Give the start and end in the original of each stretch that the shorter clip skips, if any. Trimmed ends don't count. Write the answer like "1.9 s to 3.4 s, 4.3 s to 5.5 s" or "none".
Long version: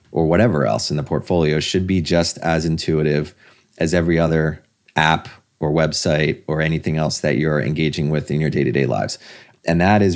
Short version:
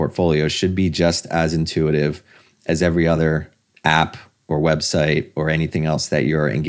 none